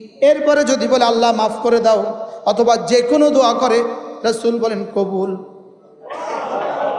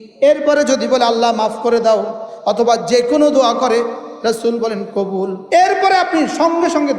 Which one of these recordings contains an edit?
second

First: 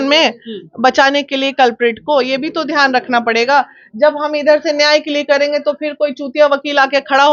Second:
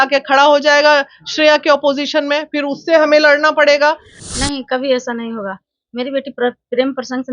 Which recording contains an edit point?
second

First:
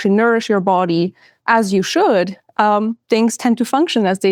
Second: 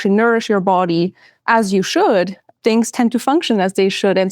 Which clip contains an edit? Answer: second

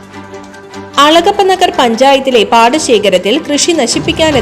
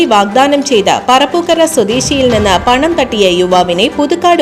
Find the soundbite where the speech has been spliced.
first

